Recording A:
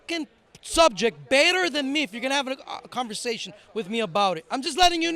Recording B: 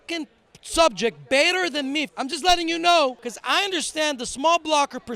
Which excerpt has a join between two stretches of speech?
B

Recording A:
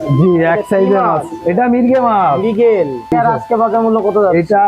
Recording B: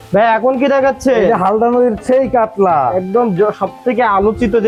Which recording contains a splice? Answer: A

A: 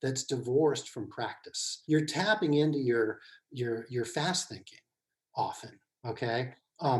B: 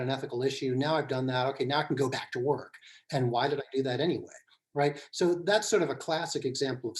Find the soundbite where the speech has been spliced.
A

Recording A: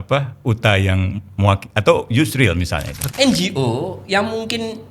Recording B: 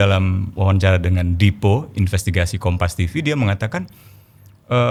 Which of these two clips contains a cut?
A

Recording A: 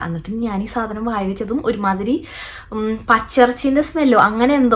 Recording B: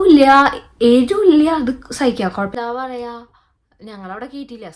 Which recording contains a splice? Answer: B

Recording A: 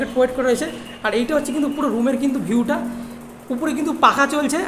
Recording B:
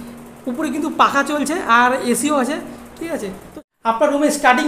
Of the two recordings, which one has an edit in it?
B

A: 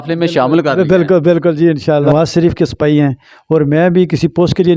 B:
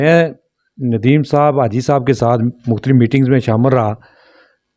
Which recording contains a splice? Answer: A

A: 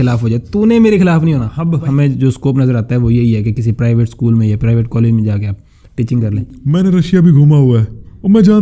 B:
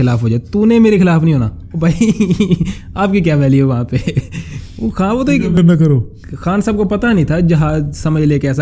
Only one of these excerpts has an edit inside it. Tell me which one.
A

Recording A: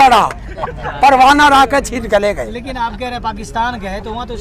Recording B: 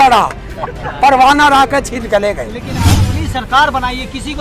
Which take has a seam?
B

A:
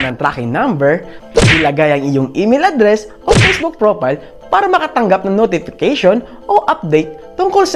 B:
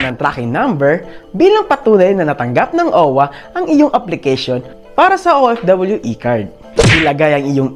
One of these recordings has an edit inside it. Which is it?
A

